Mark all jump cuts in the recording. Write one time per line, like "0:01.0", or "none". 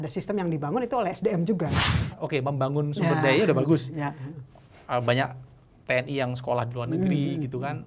0:02.1